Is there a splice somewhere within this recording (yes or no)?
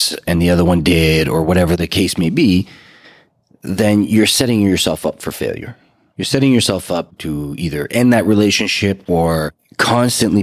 yes